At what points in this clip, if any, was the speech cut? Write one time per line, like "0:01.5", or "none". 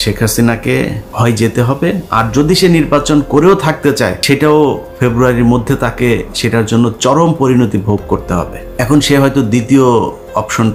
0:01.0
0:04.2
0:08.6